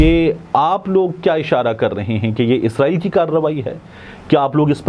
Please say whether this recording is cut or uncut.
uncut